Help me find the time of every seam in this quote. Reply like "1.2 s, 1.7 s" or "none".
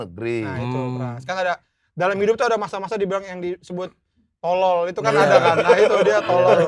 none

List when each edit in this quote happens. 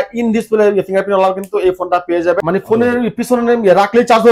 2.4 s

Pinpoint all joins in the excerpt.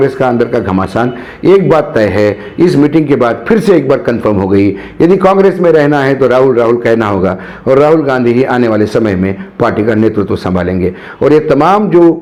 none

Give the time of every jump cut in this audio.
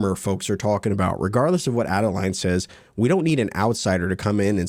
none

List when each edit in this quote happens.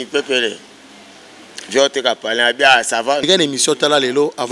3.2 s

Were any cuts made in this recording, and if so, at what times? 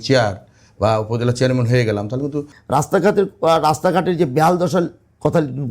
2.5 s

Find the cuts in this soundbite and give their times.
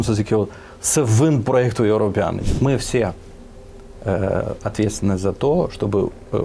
2.4 s

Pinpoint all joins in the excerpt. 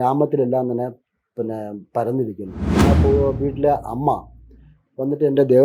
2.8 s

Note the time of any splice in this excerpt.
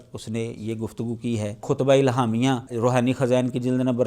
1.6 s, 2.7 s

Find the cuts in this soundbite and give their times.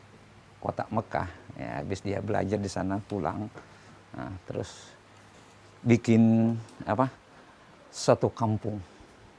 none

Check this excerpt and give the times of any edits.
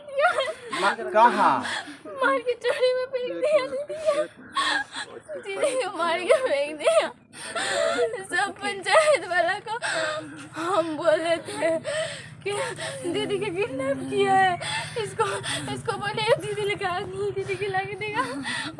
none

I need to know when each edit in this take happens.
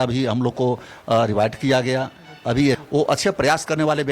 2.8 s

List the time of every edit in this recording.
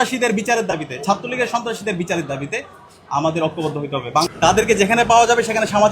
4.3 s

